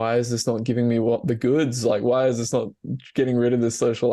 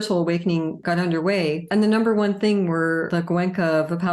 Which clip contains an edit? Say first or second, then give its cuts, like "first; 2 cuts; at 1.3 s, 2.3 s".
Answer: second; 3 cuts; at 0.8 s, 1.6 s, 3.1 s